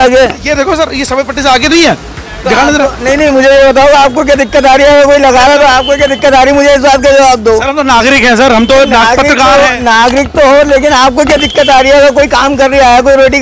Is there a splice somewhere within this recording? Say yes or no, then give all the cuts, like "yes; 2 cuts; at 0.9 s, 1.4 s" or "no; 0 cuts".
no; 0 cuts